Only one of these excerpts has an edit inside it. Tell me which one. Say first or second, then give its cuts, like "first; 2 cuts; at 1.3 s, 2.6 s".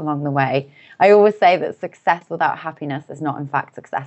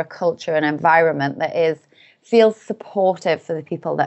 first; 1 cut; at 2.3 s